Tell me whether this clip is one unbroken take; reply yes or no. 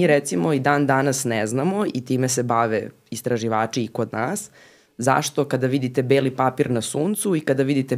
yes